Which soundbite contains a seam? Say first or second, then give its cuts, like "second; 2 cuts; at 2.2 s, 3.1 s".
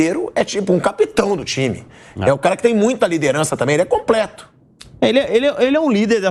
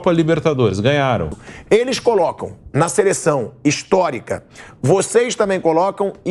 second; 1 cut; at 1.4 s